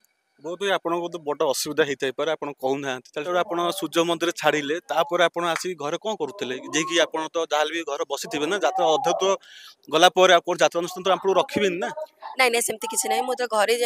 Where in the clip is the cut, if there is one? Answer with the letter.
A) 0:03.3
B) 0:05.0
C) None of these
A